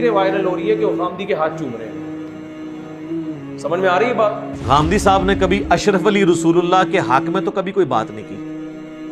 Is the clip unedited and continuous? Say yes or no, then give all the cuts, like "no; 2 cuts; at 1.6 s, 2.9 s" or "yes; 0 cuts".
no; 3 cuts; at 1.8 s, 3.1 s, 4.6 s